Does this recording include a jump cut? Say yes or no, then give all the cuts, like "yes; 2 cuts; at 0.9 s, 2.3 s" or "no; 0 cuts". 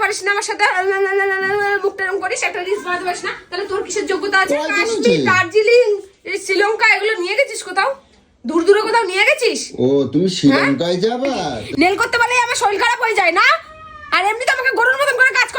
yes; 3 cuts; at 1.5 s, 4.7 s, 11.6 s